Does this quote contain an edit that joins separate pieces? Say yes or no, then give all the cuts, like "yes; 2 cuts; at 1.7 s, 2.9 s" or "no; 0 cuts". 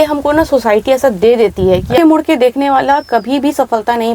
yes; 1 cut; at 2.0 s